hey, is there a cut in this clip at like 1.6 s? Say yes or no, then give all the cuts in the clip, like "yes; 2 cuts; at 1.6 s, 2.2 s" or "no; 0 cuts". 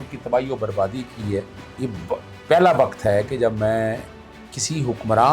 yes; 1 cut; at 1.6 s